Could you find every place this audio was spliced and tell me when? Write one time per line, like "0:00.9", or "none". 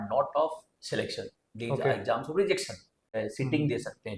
0:03.0

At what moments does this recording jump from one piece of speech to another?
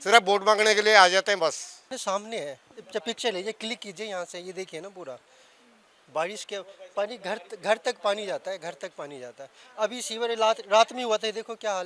0:01.9

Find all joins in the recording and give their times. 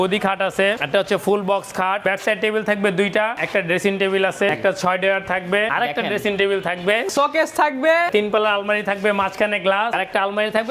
0:00.8
0:02.0
0:03.4
0:04.5
0:05.7
0:07.1
0:08.1
0:10.0

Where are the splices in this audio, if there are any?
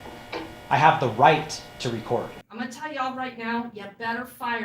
0:02.4

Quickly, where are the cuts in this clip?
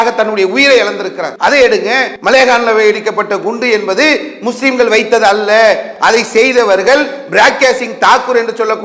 0:01.2
0:02.1
0:05.9

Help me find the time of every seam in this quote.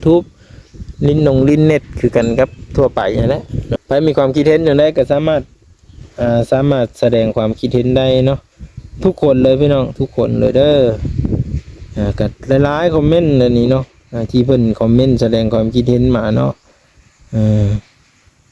0:03.8

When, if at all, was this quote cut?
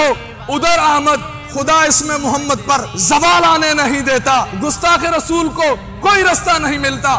0:01.4
0:02.9
0:04.5

